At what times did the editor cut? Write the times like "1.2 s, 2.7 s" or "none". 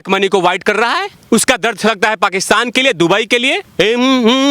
1.1 s, 3.7 s